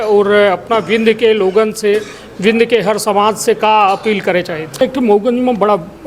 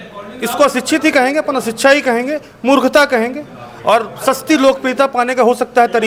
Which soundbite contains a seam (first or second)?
first